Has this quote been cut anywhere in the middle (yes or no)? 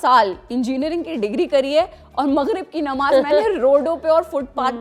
no